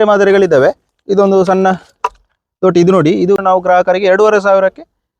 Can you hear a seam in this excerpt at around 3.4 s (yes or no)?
yes